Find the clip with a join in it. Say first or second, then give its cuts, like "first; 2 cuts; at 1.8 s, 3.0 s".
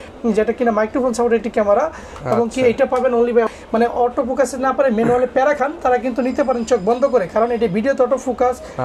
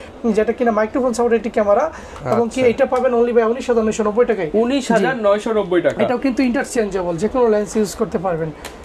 first; 1 cut; at 3.5 s